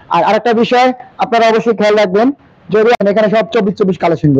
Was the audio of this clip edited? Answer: yes; 1 cut; at 3.0 s

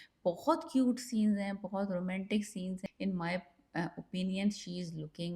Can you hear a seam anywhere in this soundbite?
yes; 1 cut; at 2.9 s

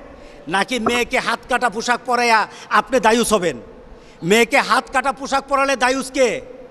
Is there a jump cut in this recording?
no; 0 cuts

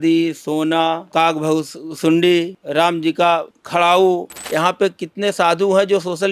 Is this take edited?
yes; 4 cuts; at 1.0 s, 2.6 s, 3.6 s, 4.4 s

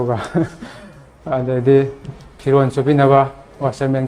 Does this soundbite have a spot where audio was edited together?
no; 0 cuts

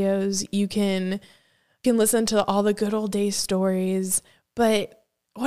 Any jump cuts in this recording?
yes; 1 cut; at 1.8 s

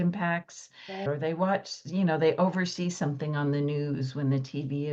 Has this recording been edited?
yes; 1 cut; at 1.0 s

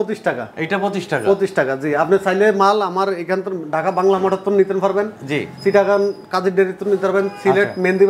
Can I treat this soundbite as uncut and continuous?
yes; 0 cuts

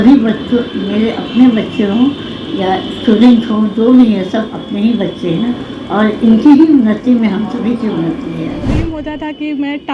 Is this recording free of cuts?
no; 1 cut; at 8.7 s

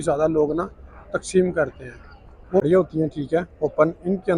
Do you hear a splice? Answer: yes; 1 cut; at 2.6 s

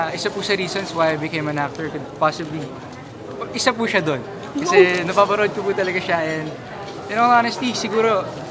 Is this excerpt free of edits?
yes; 0 cuts

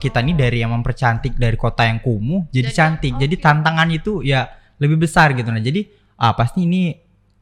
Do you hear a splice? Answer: no; 0 cuts

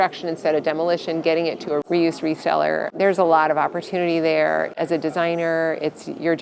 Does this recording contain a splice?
yes; 3 cuts; at 1.8 s, 2.9 s, 4.7 s

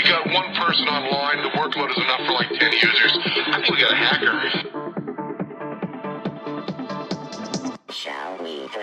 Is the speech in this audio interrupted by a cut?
no; 0 cuts

